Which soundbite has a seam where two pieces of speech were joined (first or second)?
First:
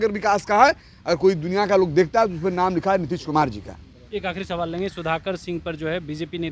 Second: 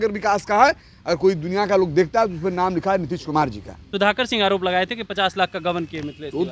second